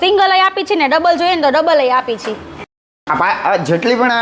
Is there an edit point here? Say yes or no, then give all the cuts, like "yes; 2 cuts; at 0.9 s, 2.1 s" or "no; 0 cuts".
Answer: no; 0 cuts